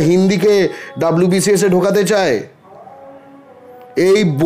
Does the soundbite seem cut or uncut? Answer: uncut